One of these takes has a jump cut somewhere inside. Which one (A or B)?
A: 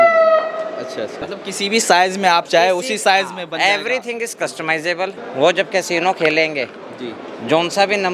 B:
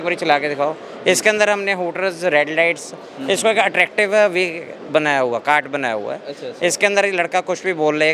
A